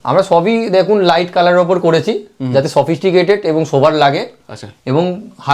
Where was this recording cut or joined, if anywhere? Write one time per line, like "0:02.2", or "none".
none